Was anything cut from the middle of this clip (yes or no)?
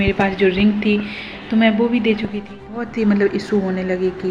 yes